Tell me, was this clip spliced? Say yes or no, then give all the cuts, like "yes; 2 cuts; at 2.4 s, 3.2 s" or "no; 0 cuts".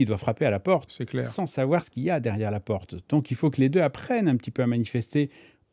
no; 0 cuts